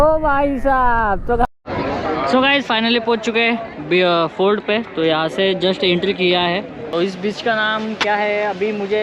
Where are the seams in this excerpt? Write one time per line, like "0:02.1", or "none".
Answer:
0:01.5
0:06.8